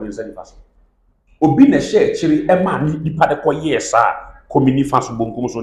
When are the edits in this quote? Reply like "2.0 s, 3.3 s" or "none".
none